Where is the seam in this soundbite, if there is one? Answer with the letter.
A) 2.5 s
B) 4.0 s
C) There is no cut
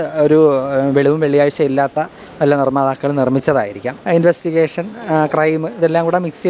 B